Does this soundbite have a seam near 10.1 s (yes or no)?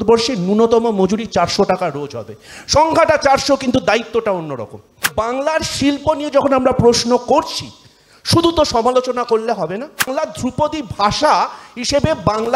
yes